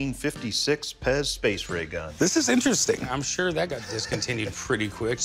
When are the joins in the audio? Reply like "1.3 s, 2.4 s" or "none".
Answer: 3.1 s

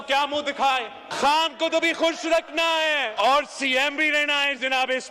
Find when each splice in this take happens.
1.1 s, 3.1 s

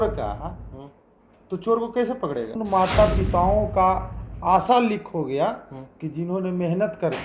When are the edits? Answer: 2.6 s

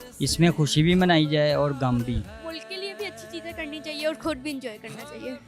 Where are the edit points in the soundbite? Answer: 2.2 s

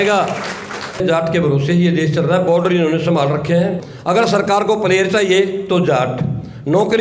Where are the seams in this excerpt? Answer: 1.0 s, 3.9 s

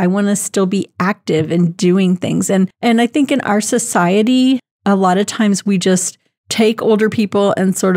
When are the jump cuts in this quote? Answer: none

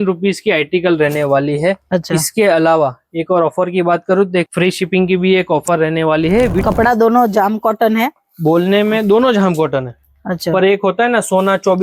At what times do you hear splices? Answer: 4.5 s, 6.6 s

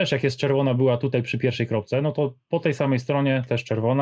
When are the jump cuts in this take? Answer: none

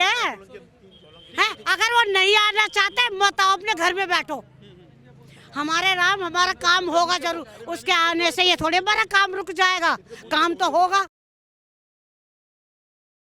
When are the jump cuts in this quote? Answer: none

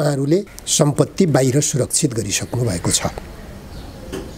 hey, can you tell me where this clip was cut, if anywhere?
none

